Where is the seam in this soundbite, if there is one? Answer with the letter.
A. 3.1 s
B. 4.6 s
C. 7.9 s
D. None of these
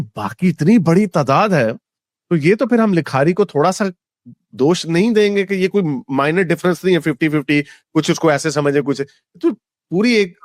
D